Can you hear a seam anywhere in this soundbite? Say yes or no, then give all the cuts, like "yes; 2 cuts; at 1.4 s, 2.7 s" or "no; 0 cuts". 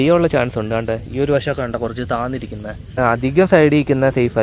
yes; 1 cut; at 2.9 s